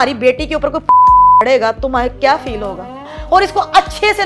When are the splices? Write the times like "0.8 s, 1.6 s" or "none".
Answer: 3.1 s